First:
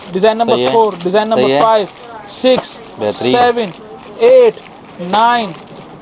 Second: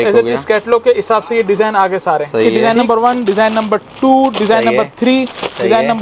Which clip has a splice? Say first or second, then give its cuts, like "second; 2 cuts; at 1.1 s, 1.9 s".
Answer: second; 1 cut; at 2.5 s